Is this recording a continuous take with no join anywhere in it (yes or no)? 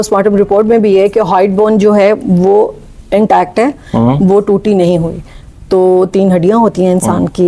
yes